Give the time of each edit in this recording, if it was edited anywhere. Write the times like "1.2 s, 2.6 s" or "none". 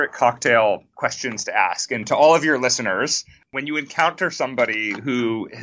0.9 s, 3.4 s